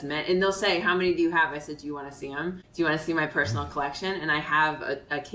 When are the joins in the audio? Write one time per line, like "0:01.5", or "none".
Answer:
0:02.6